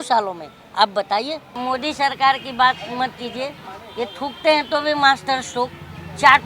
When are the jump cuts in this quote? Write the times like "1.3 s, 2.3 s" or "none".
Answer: 1.6 s

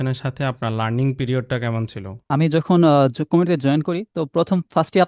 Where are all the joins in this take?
2.1 s

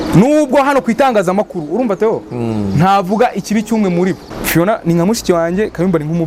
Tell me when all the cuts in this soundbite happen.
4.3 s

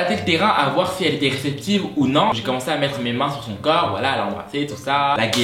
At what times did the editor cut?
none

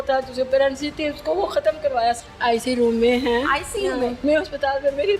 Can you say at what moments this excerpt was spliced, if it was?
2.2 s, 4.2 s

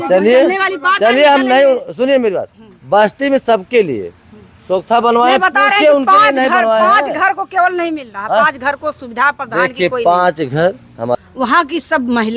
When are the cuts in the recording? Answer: 11.2 s

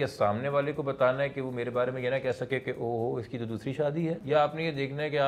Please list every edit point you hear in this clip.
4.2 s

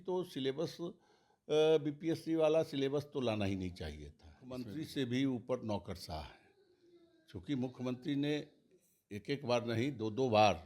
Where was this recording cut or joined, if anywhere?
4.6 s

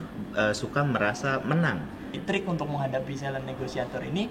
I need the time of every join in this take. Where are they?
2.1 s

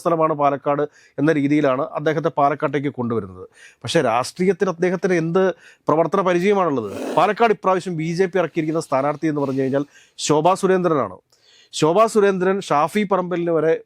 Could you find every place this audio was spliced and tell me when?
7.0 s

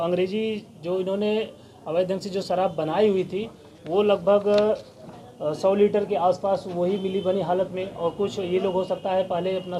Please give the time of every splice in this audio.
none

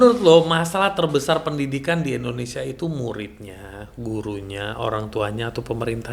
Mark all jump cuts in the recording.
none

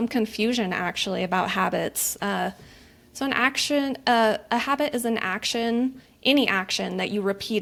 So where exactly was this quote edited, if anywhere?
none

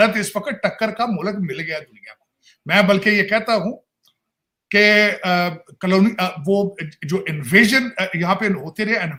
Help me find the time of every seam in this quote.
none

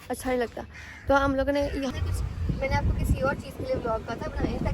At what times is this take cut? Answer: 1.9 s

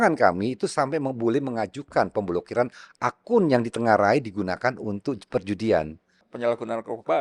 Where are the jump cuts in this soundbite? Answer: 6.2 s

